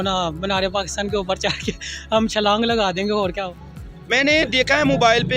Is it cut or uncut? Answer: cut